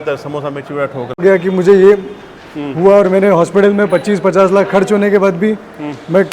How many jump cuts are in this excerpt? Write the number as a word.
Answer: one